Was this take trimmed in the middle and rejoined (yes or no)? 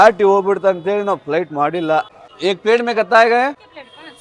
yes